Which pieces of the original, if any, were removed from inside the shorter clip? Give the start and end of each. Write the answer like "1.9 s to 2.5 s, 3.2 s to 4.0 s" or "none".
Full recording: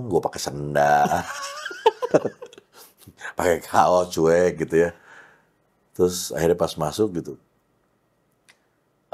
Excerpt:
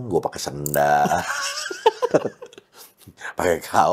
none